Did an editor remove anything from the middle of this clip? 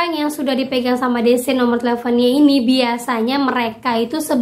no; 0 cuts

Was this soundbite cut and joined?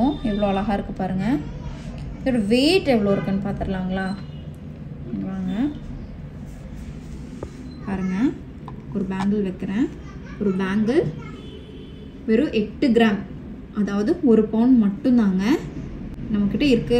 no; 0 cuts

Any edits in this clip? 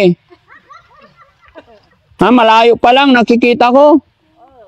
no; 0 cuts

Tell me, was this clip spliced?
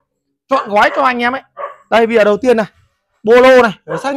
no; 0 cuts

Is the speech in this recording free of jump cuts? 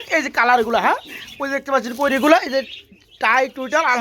yes; 0 cuts

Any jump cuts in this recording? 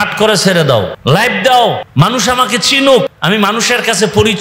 yes; 3 cuts; at 0.9 s, 1.8 s, 3.1 s

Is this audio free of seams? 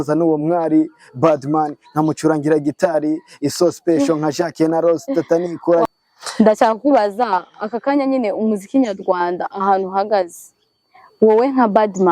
no; 1 cut; at 5.9 s

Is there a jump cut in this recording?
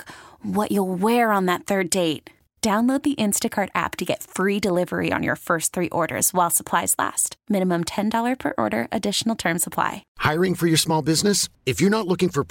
yes; 1 cut; at 10.0 s

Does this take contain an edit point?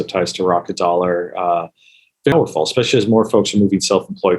yes; 1 cut; at 2.3 s

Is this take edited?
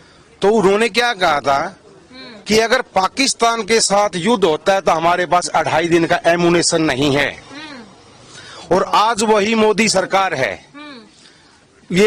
no; 0 cuts

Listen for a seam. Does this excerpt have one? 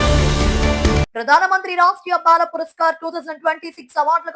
no; 0 cuts

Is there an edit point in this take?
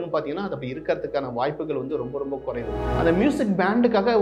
yes; 1 cut; at 2.8 s

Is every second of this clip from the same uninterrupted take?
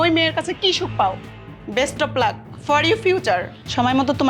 yes; 0 cuts

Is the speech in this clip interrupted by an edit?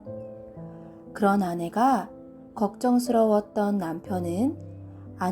yes; 1 cut; at 1.0 s

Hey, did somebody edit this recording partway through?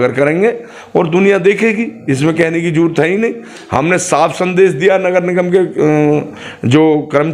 no; 0 cuts

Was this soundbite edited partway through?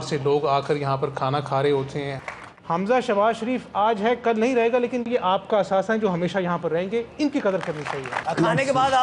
yes; 2 cuts; at 2.2 s, 8.2 s

